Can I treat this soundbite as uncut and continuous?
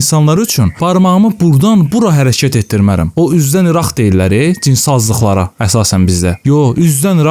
yes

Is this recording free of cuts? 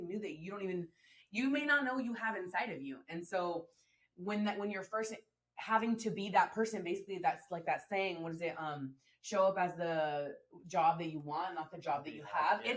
yes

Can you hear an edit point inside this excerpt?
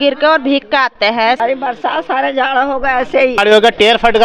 yes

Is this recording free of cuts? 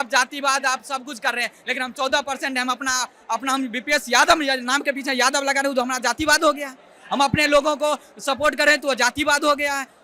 yes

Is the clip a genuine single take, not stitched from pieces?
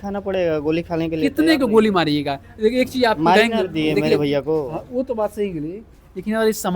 yes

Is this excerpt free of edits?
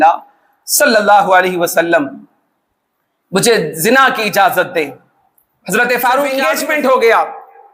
no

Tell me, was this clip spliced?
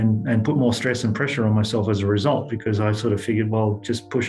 no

